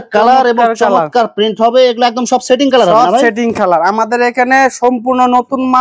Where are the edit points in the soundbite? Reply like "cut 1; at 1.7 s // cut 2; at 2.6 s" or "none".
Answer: none